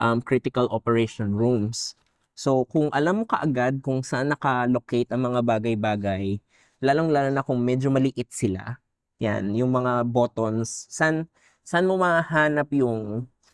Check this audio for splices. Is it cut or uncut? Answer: uncut